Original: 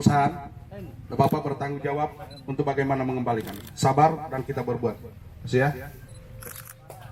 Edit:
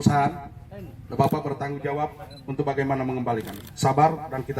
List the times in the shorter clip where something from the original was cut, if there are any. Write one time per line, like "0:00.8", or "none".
none